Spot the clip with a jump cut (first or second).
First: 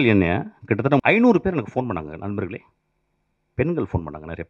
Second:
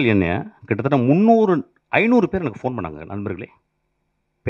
first